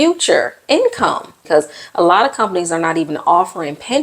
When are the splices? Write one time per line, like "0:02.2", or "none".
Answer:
0:01.3